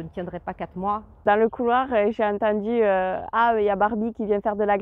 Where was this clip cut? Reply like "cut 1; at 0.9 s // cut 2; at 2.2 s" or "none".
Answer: cut 1; at 1.2 s